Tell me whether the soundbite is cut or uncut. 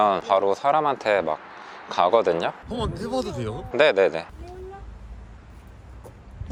uncut